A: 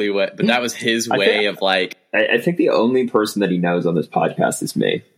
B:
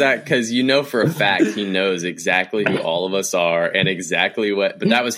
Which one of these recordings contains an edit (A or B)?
A